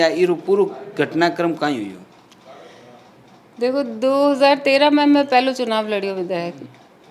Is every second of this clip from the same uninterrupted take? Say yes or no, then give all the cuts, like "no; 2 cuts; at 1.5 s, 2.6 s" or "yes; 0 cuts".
yes; 0 cuts